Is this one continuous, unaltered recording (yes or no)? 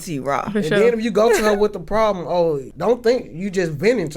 no